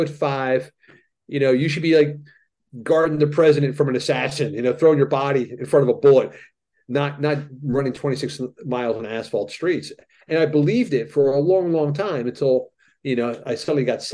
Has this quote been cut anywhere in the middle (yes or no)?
no